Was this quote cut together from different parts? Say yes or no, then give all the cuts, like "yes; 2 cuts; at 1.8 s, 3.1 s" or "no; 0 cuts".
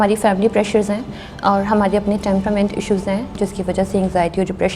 yes; 1 cut; at 3.4 s